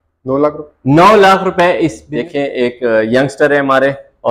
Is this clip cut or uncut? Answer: cut